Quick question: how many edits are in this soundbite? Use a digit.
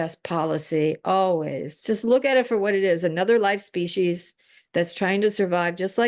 0